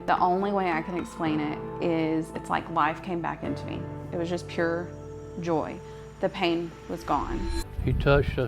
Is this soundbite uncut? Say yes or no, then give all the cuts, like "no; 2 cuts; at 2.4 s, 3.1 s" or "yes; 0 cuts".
no; 1 cut; at 7.6 s